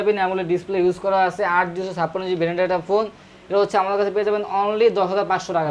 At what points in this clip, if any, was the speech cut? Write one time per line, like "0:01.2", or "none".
none